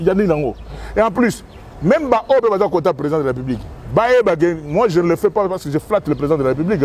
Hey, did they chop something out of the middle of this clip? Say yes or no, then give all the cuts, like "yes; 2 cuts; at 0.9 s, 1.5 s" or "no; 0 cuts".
no; 0 cuts